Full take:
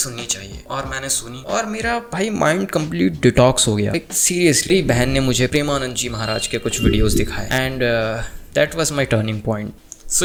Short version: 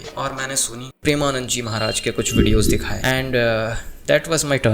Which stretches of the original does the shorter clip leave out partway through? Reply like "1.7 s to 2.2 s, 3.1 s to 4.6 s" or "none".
1.5 s to 5.5 s